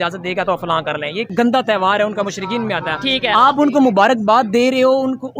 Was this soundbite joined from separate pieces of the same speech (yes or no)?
yes